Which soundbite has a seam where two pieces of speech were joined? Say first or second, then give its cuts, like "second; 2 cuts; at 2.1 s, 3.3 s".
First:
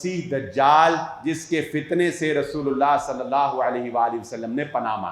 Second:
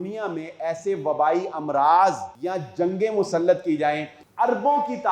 second; 2 cuts; at 2.3 s, 4.2 s